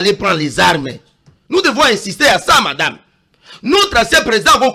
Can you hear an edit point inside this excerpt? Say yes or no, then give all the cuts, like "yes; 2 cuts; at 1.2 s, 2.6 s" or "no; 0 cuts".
no; 0 cuts